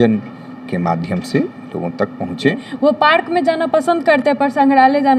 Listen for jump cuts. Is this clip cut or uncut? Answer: cut